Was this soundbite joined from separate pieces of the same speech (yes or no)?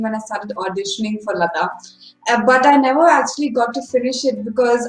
no